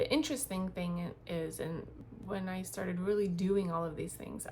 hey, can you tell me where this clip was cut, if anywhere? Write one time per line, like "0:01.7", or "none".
0:02.0